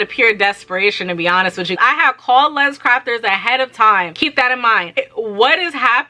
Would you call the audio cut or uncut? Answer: cut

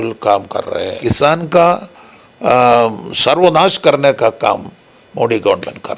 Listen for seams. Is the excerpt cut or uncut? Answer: cut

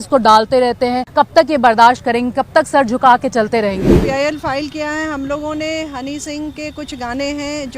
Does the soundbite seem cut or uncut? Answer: cut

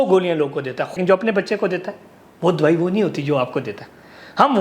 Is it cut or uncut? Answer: cut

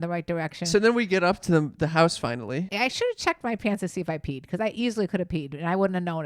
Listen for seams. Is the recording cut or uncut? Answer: cut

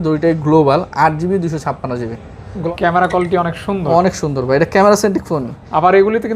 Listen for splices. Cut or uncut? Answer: cut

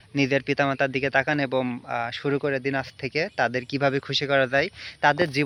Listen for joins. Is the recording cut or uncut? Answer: uncut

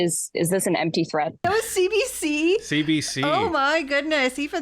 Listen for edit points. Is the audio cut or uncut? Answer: cut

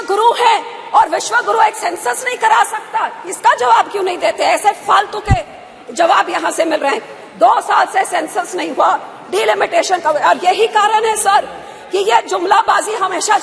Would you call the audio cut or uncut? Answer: uncut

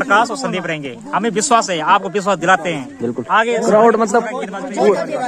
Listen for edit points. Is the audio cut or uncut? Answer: uncut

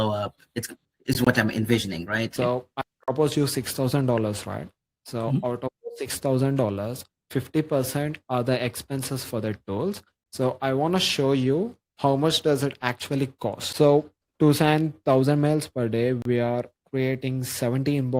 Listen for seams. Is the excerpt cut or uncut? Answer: cut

